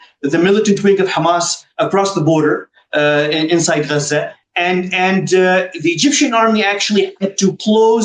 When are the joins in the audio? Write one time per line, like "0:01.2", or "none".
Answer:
none

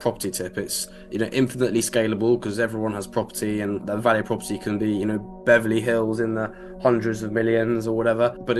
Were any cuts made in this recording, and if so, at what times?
none

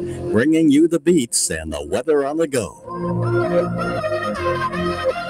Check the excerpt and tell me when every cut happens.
0:02.8

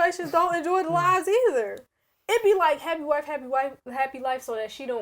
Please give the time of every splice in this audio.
none

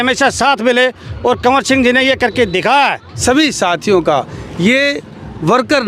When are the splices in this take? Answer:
0:03.1

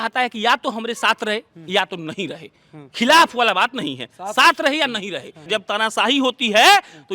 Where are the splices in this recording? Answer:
0:05.5

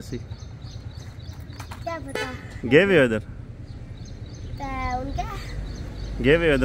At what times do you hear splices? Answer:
none

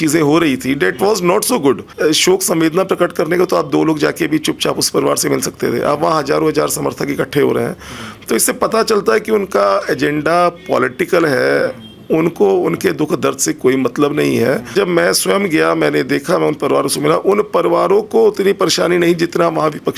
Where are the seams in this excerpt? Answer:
0:01.9
0:14.7

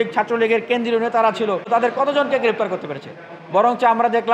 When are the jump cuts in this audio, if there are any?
0:01.7

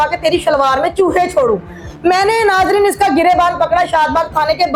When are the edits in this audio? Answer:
none

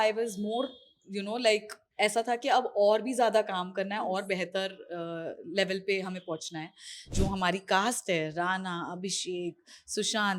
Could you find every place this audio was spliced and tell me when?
0:07.1

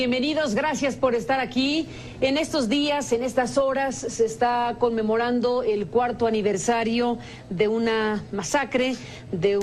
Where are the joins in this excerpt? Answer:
0:06.5

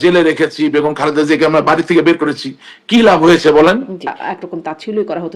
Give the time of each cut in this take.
0:04.4

